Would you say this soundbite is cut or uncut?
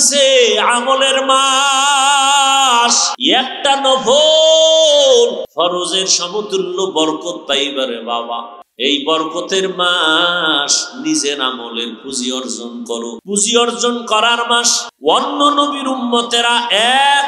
cut